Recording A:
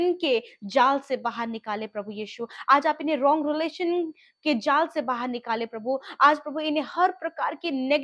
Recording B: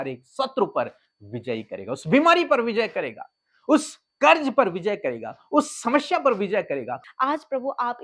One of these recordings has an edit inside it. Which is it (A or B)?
B